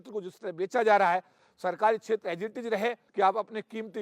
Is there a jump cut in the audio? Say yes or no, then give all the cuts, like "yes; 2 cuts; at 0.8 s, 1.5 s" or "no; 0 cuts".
yes; 1 cut; at 3.0 s